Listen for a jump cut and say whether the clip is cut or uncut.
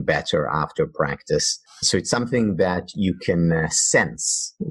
uncut